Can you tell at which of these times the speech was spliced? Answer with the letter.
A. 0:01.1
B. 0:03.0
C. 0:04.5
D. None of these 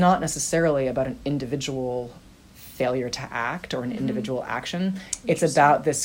D